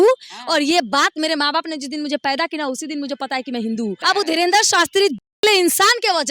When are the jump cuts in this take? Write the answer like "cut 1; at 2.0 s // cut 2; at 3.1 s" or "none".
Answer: cut 1; at 4.0 s